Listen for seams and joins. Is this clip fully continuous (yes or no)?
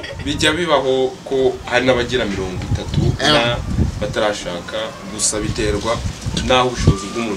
yes